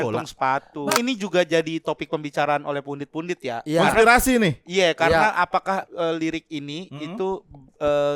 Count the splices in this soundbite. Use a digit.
1